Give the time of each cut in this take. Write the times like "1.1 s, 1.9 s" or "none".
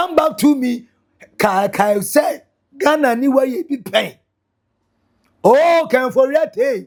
none